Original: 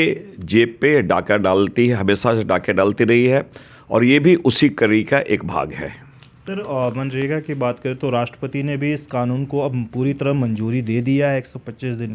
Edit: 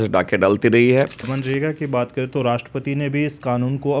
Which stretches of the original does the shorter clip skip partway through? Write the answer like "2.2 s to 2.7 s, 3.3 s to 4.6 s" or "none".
3.7 s to 7.0 s